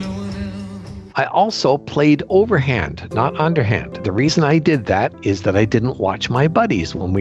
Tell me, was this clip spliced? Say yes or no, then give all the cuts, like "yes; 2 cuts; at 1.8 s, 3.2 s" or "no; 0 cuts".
yes; 2 cuts; at 1.0 s, 4.0 s